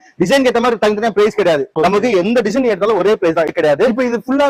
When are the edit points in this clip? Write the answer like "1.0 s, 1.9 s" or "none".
1.7 s, 3.5 s

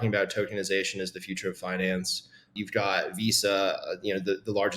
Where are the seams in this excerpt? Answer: 2.5 s

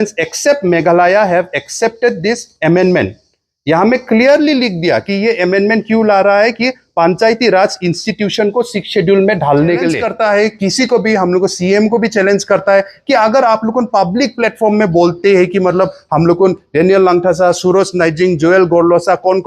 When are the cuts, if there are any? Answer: 10.1 s

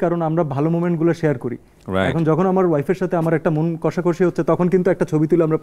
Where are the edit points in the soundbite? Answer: none

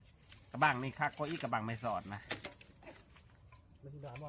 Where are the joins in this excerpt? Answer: none

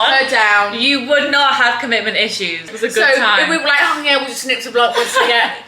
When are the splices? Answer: 2.7 s

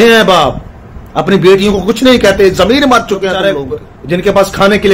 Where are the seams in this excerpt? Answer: 3.6 s

